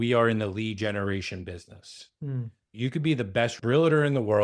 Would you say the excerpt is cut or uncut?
cut